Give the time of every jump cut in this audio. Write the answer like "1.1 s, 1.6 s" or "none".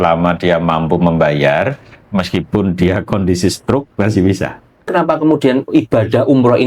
4.9 s